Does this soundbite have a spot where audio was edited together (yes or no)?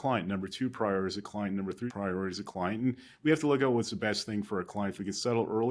yes